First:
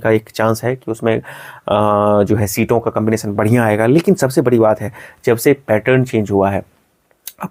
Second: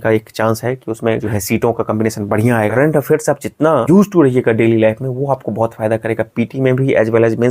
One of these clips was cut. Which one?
second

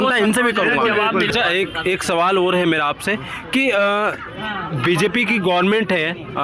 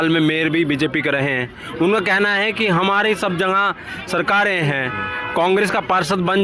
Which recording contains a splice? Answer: first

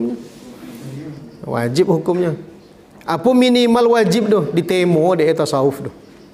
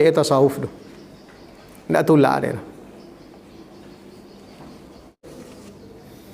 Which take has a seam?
second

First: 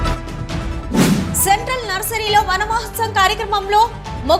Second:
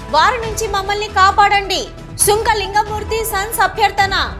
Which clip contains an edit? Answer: first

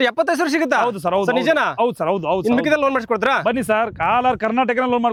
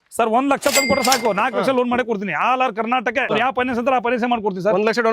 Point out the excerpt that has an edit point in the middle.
second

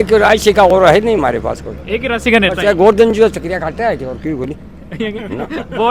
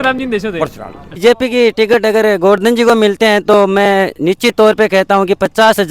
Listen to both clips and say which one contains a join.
second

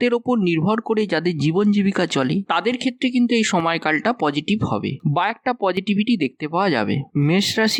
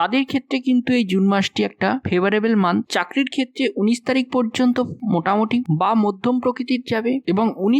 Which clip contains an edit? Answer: second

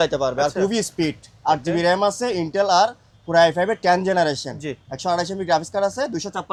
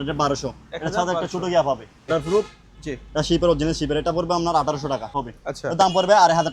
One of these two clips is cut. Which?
second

